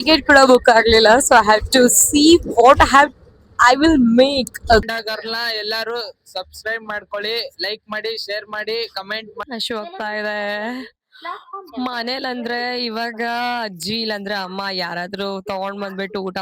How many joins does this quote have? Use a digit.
2